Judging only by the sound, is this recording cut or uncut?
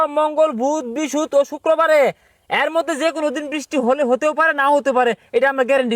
uncut